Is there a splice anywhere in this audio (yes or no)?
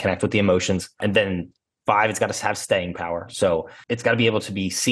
yes